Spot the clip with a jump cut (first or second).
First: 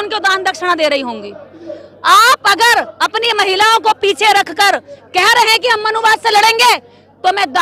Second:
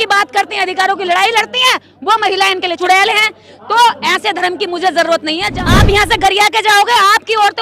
second